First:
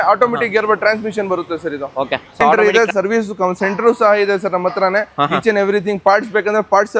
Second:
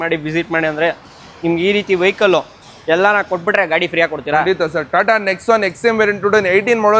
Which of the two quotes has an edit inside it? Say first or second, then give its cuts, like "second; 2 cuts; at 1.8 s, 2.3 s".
first; 1 cut; at 2.5 s